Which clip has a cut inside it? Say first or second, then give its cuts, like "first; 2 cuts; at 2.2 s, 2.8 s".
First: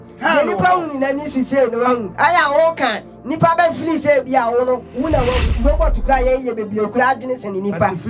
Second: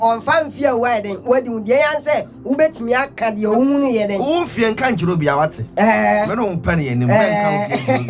first; 2 cuts; at 2.1 s, 5.5 s